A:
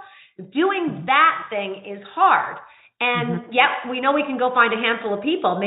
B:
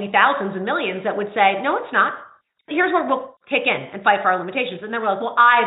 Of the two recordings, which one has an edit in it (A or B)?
B